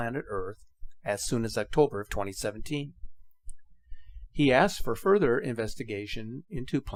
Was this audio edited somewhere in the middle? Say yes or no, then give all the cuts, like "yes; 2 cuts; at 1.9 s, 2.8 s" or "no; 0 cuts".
no; 0 cuts